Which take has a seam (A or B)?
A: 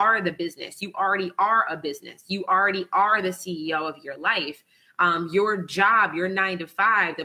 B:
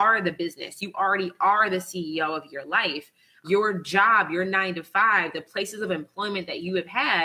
B